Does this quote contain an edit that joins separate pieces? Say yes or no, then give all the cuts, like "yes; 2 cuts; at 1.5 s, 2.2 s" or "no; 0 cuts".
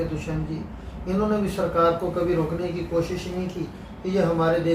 no; 0 cuts